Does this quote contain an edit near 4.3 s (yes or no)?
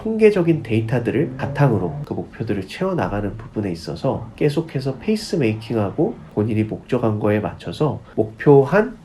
no